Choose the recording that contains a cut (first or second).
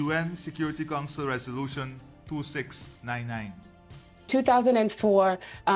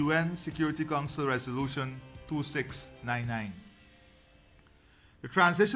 first